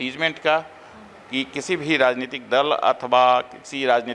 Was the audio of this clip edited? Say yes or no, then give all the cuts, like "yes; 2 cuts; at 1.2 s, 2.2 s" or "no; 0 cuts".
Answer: no; 0 cuts